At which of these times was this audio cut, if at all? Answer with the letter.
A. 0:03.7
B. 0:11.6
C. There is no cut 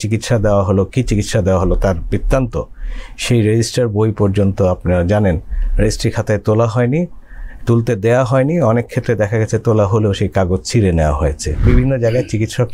B